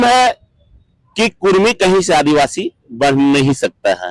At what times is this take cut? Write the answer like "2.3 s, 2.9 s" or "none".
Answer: none